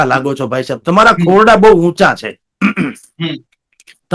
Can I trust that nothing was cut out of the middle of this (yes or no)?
yes